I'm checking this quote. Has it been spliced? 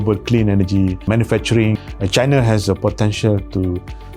yes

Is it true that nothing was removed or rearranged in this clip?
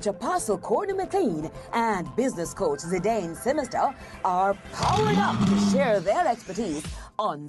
yes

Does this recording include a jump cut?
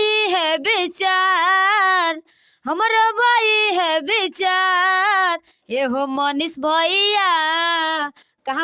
no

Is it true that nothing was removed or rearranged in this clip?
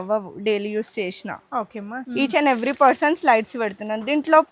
no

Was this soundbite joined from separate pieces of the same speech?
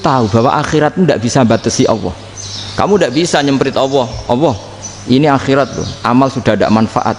no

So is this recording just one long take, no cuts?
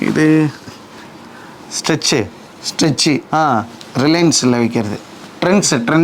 yes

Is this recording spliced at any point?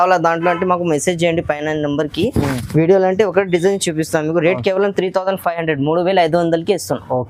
no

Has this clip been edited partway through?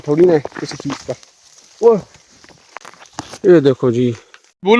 no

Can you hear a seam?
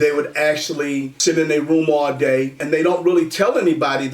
yes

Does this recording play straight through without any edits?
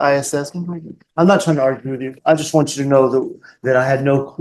yes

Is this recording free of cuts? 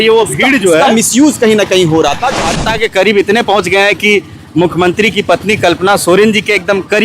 no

